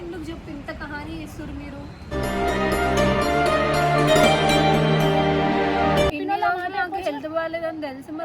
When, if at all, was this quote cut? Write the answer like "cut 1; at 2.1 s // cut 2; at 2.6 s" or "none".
cut 1; at 6.1 s